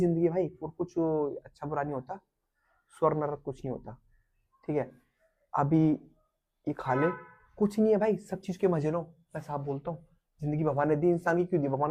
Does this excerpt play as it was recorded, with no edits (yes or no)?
yes